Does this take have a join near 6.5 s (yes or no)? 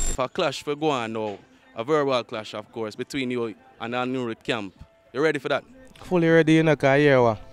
no